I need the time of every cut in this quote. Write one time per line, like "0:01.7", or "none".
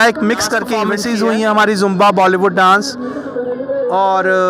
0:01.0